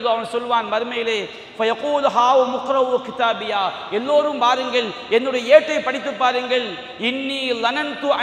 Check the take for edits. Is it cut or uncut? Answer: uncut